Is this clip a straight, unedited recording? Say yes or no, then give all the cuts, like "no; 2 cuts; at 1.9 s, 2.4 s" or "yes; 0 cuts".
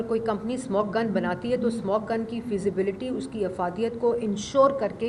yes; 0 cuts